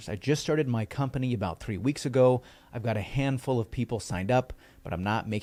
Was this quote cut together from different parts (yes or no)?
no